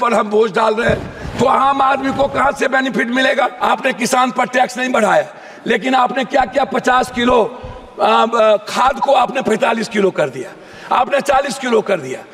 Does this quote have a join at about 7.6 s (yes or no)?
no